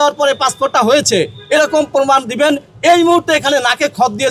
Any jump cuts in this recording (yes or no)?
no